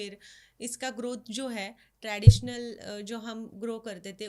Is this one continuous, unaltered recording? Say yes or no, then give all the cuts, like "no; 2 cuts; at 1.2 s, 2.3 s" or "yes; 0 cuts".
yes; 0 cuts